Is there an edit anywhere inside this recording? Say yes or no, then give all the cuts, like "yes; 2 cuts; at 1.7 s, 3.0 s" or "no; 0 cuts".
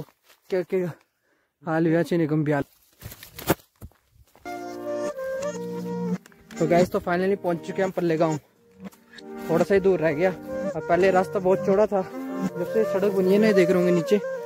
yes; 1 cut; at 2.6 s